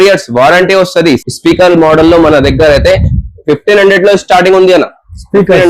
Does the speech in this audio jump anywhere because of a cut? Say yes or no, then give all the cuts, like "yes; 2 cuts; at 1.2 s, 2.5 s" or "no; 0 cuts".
yes; 1 cut; at 1.2 s